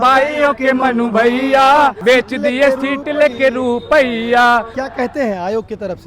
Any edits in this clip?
yes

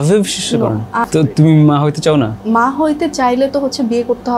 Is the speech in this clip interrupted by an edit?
yes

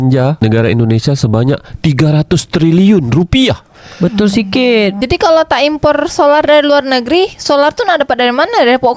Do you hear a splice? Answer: no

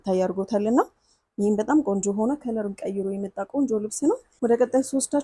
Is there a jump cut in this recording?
yes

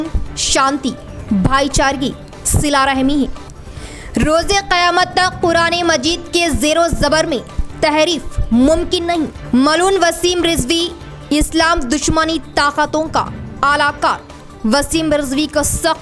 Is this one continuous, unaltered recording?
yes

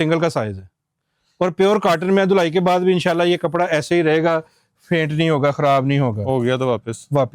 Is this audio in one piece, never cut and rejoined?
yes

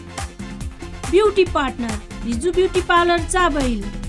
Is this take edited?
yes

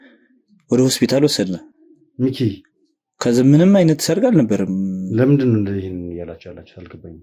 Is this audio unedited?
yes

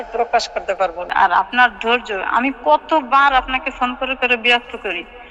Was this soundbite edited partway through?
yes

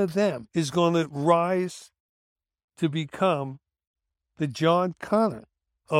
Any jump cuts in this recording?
no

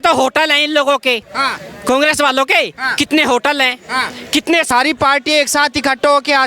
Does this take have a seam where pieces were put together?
yes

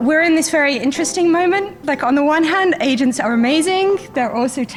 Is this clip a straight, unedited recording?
yes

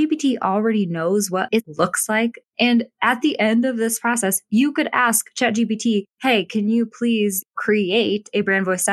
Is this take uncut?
no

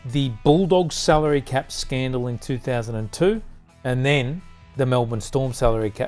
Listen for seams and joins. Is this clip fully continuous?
yes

